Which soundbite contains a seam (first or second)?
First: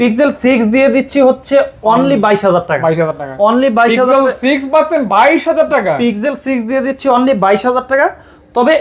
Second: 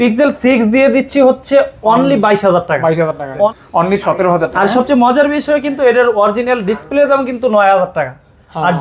second